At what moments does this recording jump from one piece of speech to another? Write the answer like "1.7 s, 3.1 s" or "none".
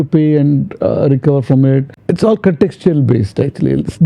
1.9 s